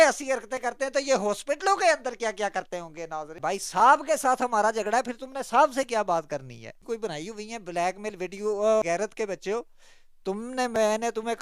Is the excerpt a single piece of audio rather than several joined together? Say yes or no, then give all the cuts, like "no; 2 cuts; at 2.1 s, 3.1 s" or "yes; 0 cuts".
no; 3 cuts; at 3.3 s, 6.8 s, 8.8 s